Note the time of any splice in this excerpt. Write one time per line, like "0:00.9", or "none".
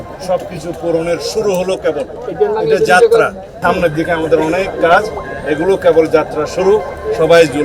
0:03.5

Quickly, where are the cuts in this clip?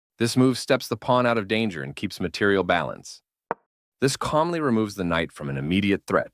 0:03.3

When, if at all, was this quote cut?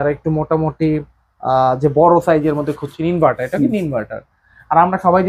none

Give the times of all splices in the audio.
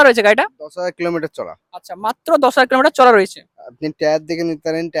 none

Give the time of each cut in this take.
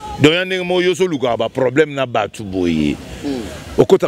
none

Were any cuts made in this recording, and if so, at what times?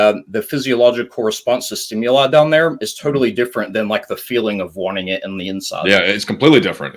none

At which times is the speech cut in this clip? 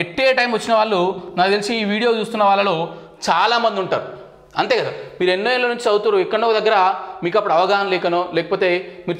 none

